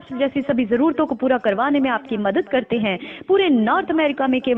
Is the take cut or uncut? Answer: uncut